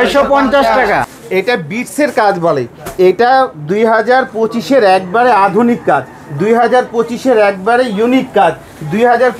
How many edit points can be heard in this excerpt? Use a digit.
1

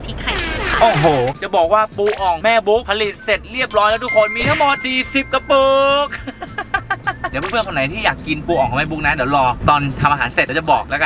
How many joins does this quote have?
0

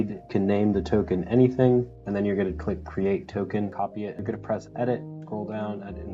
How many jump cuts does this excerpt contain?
2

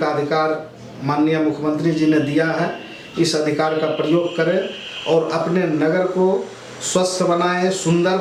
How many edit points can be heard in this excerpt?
0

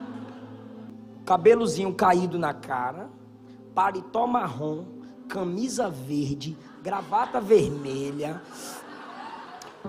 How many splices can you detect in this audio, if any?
1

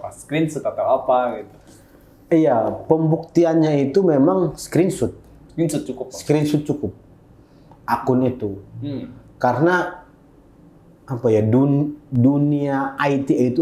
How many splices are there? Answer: 0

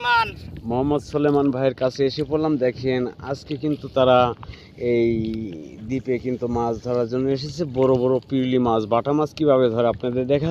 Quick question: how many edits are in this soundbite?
0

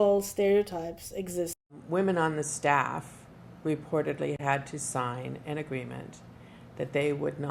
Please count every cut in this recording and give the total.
1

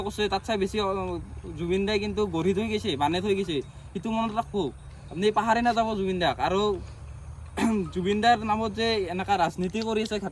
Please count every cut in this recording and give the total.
0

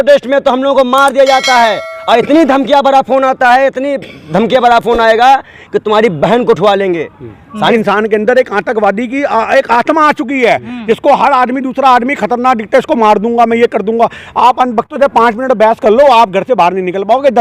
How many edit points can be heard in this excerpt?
1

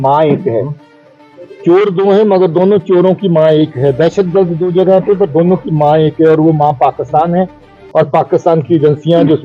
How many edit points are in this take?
0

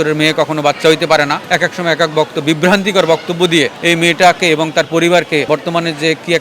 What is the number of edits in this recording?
3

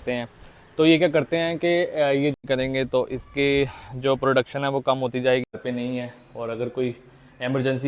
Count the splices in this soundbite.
2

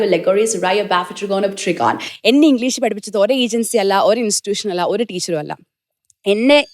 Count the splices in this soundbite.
1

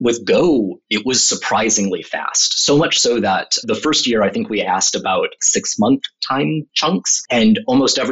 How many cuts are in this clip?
2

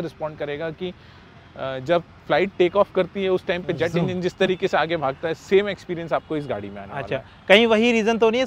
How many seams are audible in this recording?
0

